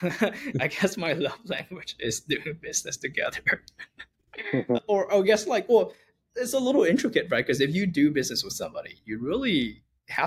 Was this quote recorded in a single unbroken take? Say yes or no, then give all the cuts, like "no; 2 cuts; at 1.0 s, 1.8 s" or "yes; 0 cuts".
yes; 0 cuts